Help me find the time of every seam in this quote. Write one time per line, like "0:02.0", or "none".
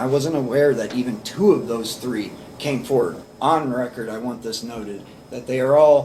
0:03.2